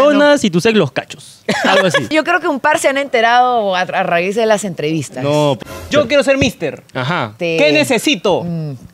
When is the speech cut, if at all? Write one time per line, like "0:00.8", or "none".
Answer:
0:02.1
0:05.6
0:07.3